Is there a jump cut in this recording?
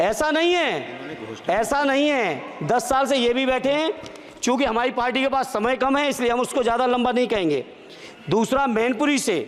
no; 0 cuts

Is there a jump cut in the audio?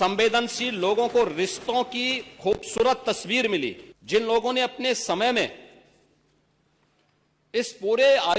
yes; 1 cut; at 3.9 s

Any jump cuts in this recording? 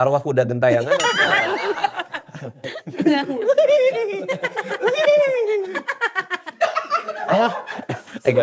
no; 0 cuts

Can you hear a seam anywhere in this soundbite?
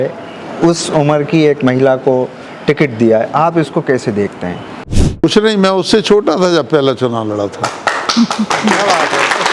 no; 0 cuts

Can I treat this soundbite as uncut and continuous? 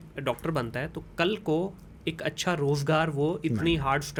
yes; 0 cuts

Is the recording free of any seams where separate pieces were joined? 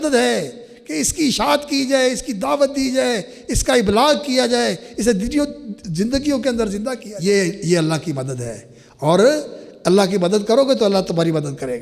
no; 1 cut; at 7.1 s

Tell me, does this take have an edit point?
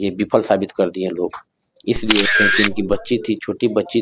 yes; 1 cut; at 2.3 s

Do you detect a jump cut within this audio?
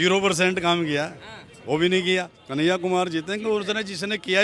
yes; 1 cut; at 2.4 s

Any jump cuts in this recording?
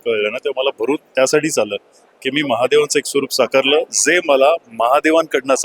no; 0 cuts

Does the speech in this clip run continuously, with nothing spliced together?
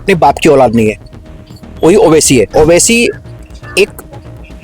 no; 1 cut; at 2.5 s

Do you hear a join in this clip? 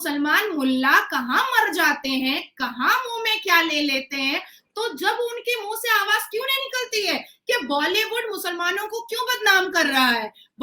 no; 0 cuts

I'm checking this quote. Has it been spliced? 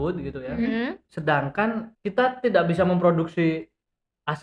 yes; 2 cuts; at 1.1 s, 1.9 s

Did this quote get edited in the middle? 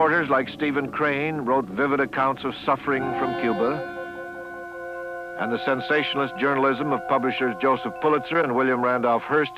yes; 1 cut; at 6.6 s

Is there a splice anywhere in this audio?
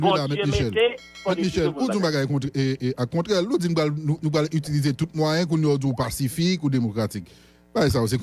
no; 0 cuts

